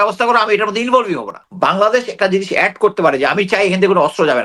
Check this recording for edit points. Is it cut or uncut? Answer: cut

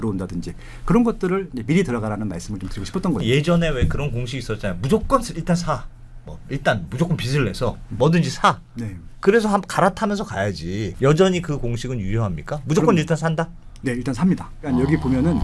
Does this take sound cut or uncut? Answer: cut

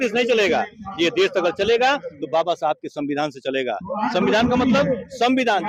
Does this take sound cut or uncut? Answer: uncut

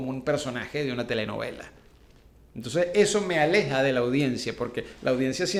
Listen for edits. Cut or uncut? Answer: uncut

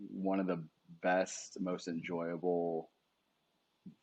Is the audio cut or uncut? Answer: uncut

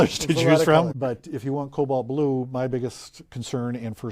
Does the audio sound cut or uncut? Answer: cut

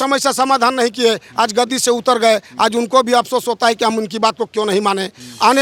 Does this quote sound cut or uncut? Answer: uncut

